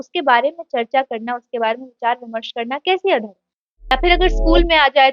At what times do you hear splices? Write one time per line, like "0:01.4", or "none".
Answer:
0:03.9